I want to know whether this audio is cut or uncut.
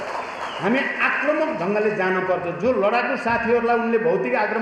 uncut